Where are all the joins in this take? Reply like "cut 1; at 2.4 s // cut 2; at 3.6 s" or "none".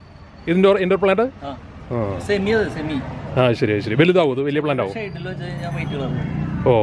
none